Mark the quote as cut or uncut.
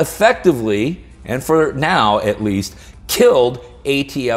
uncut